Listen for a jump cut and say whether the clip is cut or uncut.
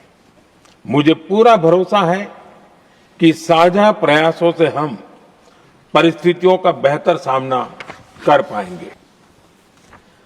cut